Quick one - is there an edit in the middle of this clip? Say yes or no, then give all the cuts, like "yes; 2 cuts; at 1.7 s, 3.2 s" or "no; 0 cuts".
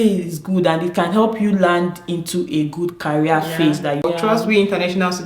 yes; 1 cut; at 4.0 s